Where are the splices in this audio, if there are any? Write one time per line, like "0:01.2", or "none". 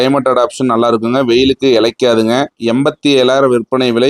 0:02.6